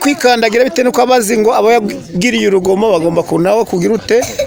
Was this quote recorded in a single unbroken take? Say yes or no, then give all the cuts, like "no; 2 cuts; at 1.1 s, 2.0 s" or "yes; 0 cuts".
yes; 0 cuts